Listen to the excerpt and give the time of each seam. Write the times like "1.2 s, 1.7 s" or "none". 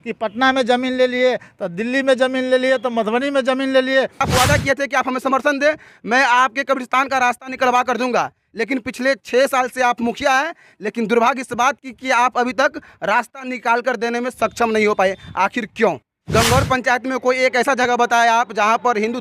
4.3 s, 16.1 s